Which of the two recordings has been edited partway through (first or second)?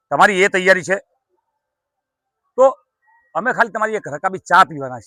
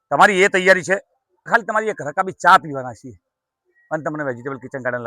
second